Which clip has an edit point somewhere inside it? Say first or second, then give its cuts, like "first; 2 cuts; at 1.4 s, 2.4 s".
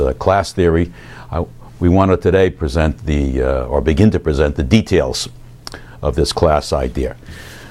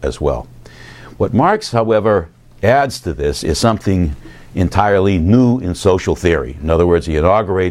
second; 1 cut; at 4.5 s